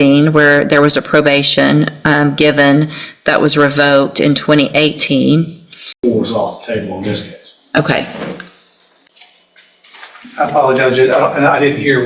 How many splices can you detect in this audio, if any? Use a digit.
1